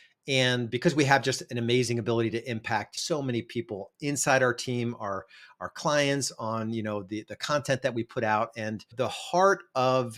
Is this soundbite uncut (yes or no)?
yes